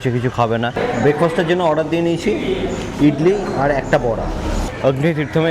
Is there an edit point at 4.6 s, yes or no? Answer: yes